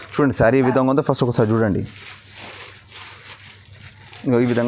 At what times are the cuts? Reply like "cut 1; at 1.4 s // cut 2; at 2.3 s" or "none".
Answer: none

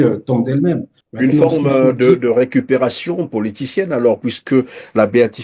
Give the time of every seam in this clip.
cut 1; at 0.9 s

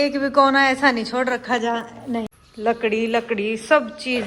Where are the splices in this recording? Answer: cut 1; at 2.4 s

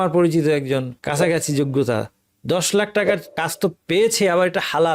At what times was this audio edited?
cut 1; at 1.0 s // cut 2; at 3.3 s

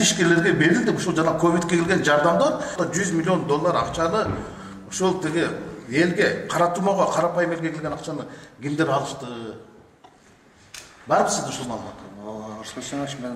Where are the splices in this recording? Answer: cut 1; at 2.7 s

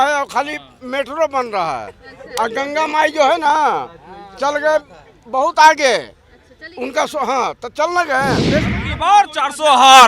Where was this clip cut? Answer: cut 1; at 8.7 s

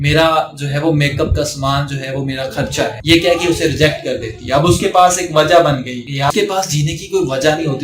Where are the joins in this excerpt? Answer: cut 1; at 6.3 s

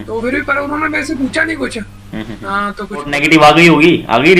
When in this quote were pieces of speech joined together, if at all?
cut 1; at 3.1 s

